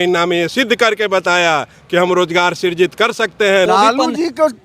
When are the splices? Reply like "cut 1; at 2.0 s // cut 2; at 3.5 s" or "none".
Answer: cut 1; at 3.7 s